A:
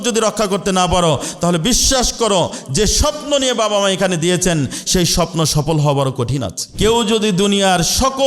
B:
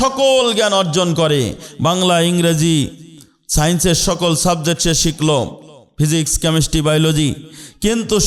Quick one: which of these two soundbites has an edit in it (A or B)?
A